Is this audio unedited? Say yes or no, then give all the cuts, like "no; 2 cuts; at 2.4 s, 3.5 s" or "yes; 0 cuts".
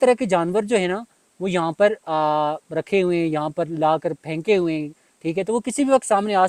yes; 0 cuts